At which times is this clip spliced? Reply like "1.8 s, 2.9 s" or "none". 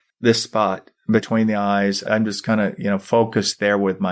1.3 s